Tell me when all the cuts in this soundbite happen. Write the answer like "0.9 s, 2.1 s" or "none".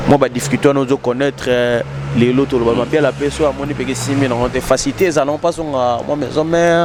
none